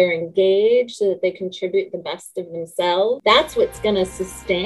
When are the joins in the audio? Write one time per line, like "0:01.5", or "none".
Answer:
0:03.2

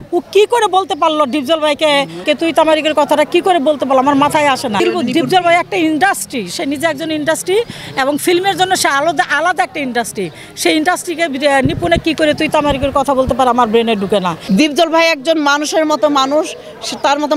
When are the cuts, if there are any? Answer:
0:02.2
0:04.8
0:14.4

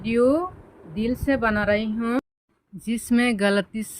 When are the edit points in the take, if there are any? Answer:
0:02.2

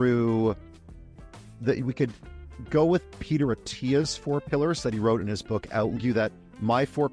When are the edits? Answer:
0:06.0

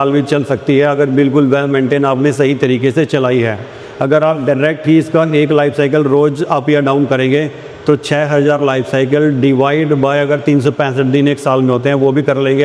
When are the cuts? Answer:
none

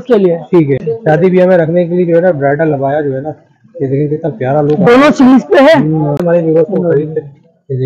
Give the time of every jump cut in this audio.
0:00.8
0:06.2

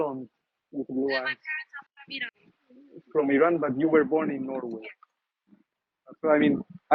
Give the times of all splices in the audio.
none

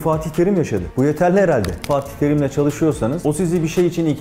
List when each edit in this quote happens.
0:01.8
0:03.2

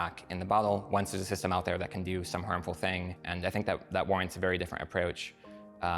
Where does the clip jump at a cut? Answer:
0:03.2

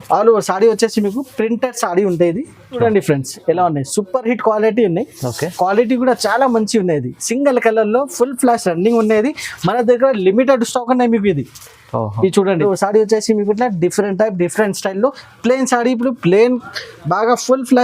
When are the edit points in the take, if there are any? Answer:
0:02.7
0:12.6

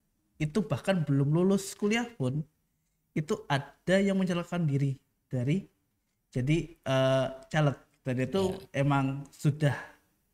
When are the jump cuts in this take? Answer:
none

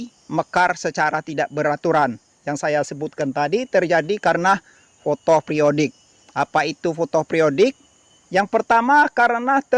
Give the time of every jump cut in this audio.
none

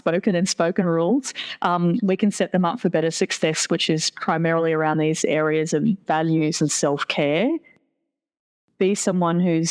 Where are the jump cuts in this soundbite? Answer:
0:08.3

